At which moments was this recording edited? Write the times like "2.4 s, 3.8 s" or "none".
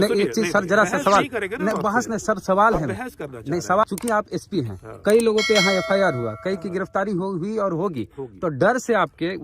3.8 s